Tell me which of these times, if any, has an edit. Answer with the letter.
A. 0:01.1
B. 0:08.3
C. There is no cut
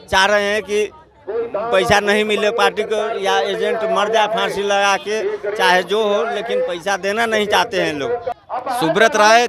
B